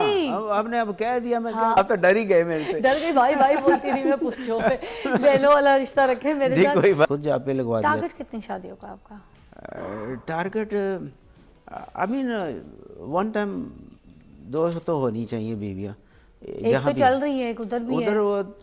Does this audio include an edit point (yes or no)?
yes